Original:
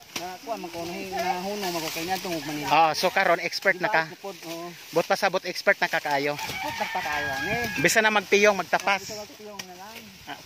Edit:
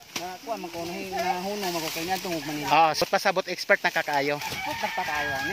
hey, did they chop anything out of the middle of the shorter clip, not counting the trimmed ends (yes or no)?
yes